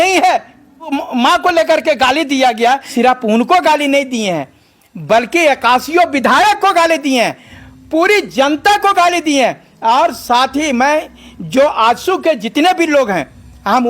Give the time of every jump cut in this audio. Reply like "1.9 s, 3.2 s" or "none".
0.9 s, 2.9 s